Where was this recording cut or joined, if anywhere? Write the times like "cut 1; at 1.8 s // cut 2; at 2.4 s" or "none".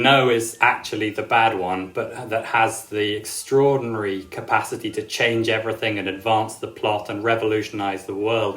none